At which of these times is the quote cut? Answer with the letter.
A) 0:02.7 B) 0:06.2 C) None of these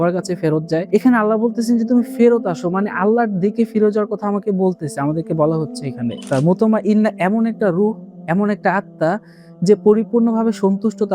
B